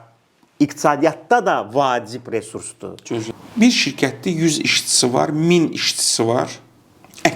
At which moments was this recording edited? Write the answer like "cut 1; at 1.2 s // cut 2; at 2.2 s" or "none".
cut 1; at 3.3 s